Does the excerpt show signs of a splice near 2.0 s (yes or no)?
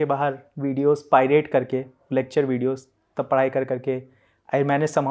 no